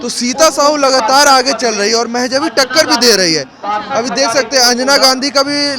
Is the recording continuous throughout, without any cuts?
yes; 0 cuts

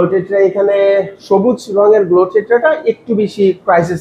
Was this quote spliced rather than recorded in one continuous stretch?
no; 0 cuts

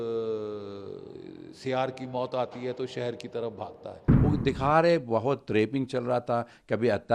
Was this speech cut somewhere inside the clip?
yes; 1 cut; at 4.1 s

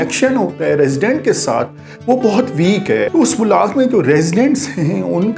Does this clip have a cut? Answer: yes; 1 cut; at 3.1 s

